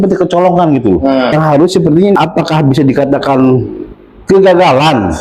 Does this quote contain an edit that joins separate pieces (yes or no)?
yes